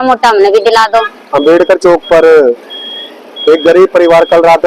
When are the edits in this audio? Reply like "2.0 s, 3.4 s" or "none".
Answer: 1.2 s

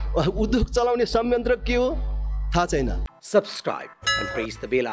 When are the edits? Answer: 3.1 s

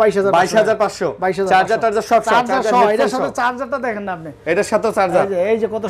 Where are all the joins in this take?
none

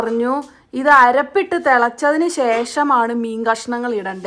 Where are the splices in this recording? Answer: none

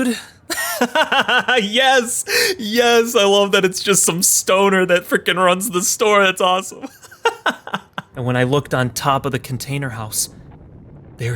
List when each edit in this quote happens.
8.0 s

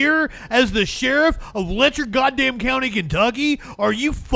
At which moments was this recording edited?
none

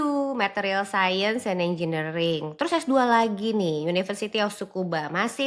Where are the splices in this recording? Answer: none

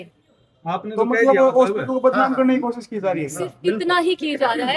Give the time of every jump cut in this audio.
none

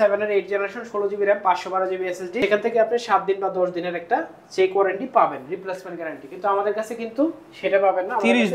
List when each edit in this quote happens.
2.4 s

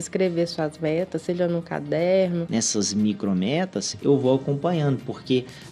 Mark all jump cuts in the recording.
2.4 s

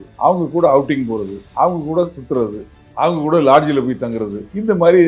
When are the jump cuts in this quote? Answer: none

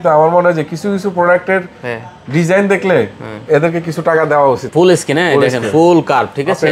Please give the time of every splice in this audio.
4.6 s

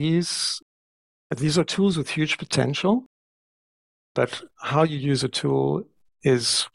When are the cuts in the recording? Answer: 0.9 s

